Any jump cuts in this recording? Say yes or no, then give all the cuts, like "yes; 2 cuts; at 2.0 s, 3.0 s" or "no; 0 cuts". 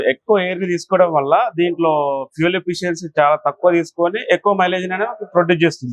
no; 0 cuts